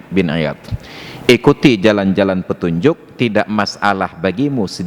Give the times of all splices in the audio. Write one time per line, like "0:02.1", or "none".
none